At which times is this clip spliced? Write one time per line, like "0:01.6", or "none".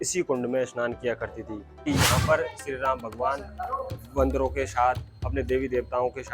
0:01.7